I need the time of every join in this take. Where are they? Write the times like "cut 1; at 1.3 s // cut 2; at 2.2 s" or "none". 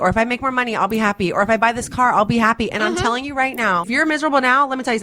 cut 1; at 3.9 s